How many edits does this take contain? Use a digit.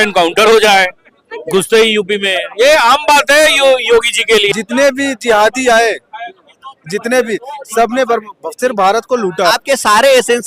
2